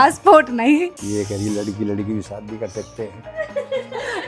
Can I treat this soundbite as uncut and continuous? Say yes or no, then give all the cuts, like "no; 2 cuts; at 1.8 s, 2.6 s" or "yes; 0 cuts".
no; 1 cut; at 1.0 s